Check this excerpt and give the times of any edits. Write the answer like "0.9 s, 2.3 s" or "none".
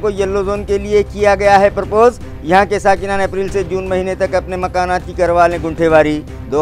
none

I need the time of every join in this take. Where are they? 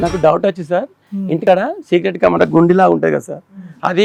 none

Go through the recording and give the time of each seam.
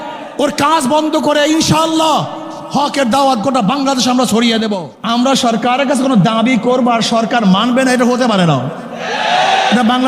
4.9 s

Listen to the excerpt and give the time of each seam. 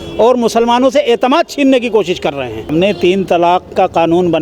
2.7 s

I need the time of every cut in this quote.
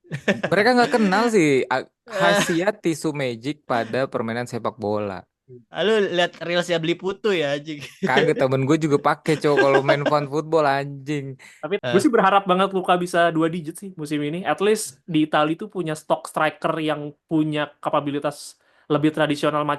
11.8 s

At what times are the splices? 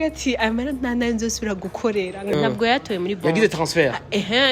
2.3 s

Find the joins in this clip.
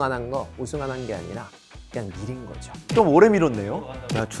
2.9 s

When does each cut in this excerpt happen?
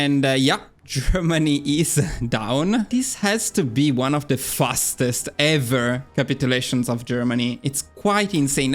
2.9 s

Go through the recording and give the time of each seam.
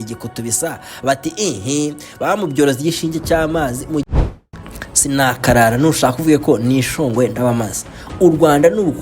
4.0 s

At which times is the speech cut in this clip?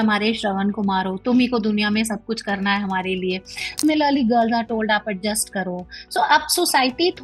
3.8 s

